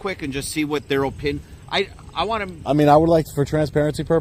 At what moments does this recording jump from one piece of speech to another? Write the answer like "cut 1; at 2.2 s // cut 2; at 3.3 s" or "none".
none